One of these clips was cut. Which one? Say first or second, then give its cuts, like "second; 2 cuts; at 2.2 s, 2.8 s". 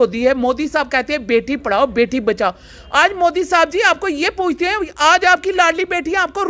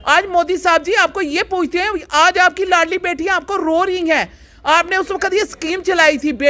second; 1 cut; at 5.0 s